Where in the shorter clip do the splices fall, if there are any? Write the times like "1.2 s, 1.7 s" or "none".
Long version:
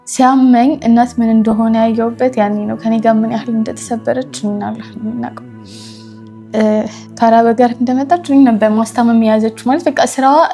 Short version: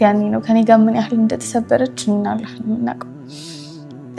none